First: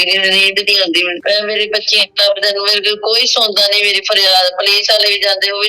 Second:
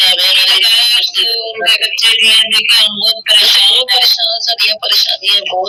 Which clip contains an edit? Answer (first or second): first